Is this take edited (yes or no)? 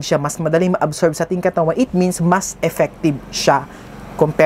no